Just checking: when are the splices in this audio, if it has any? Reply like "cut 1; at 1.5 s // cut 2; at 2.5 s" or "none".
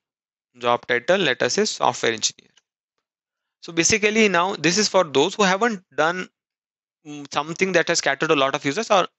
none